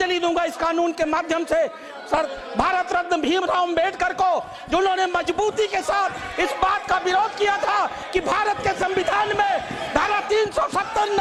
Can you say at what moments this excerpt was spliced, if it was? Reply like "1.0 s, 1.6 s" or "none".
none